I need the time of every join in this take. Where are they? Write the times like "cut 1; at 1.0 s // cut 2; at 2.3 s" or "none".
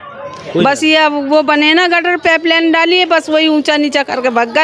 none

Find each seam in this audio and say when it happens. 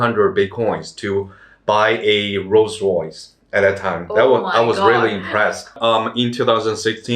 cut 1; at 5.7 s

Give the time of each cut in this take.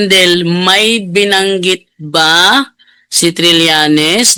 none

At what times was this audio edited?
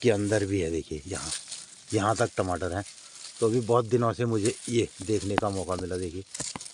none

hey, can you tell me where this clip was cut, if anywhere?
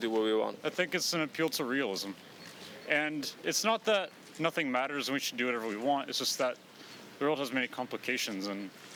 none

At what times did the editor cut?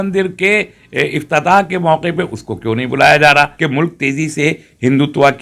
cut 1; at 3.5 s

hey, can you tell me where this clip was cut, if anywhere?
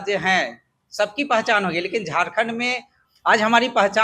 cut 1; at 2.9 s

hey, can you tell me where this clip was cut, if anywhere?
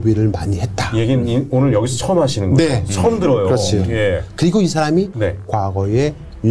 cut 1; at 5.1 s

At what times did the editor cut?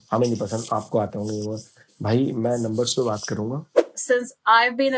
cut 1; at 3.9 s

